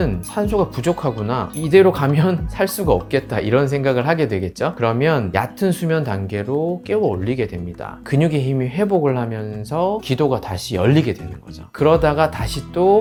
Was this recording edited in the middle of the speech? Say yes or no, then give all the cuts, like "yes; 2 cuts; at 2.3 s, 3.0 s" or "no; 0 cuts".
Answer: no; 0 cuts